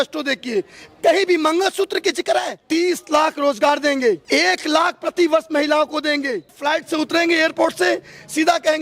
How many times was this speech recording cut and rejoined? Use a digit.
3